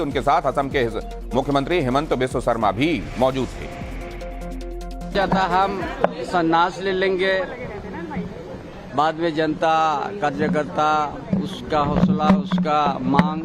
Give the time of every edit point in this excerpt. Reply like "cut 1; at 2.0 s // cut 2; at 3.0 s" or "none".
cut 1; at 12.1 s